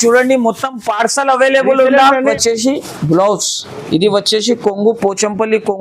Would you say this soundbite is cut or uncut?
cut